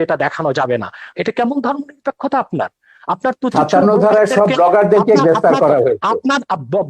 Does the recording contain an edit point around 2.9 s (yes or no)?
no